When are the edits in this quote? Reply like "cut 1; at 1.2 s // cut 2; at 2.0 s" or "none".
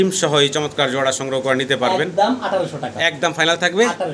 none